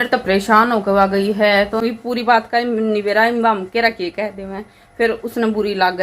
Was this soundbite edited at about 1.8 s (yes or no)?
yes